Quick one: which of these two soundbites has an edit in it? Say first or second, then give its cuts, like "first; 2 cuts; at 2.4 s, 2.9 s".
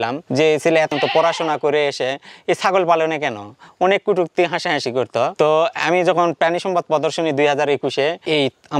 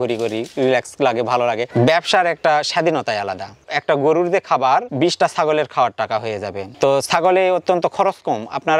second; 1 cut; at 3.7 s